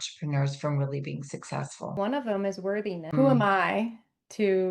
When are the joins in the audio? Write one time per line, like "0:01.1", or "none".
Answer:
0:01.9
0:03.0